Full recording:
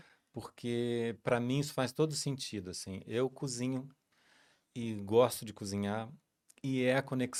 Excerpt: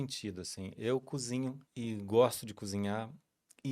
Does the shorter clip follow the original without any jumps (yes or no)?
no